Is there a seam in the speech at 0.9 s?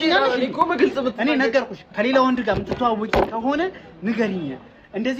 no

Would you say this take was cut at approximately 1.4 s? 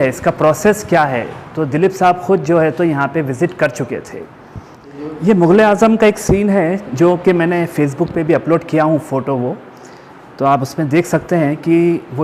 no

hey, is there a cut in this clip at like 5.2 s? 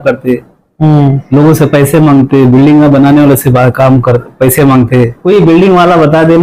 yes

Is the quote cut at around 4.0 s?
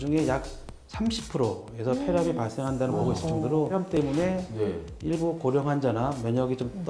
yes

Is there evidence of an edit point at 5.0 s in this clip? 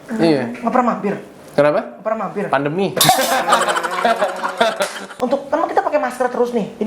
yes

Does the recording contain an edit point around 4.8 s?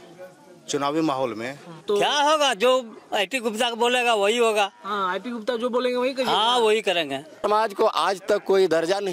no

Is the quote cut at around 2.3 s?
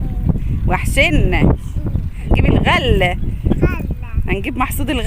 yes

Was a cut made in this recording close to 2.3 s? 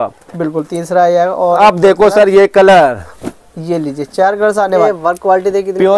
no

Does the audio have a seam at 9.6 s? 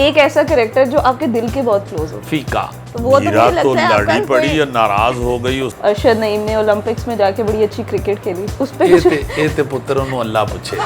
no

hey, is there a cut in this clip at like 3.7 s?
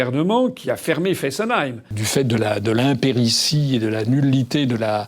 no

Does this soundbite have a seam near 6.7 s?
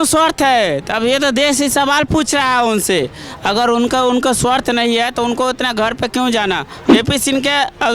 yes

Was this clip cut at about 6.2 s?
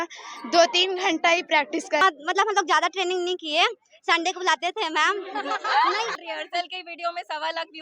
yes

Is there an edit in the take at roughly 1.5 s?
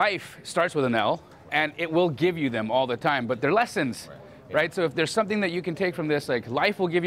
yes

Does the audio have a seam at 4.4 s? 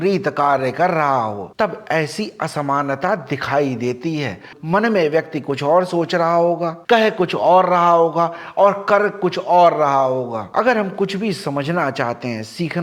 no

